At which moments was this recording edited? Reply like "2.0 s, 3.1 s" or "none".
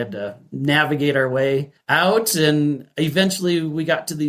none